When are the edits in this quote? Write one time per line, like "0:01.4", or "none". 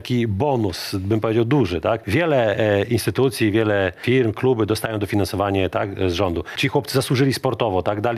0:02.0
0:04.0
0:06.5